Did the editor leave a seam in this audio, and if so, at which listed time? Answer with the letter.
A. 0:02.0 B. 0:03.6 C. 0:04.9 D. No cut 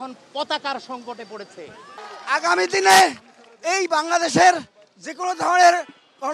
A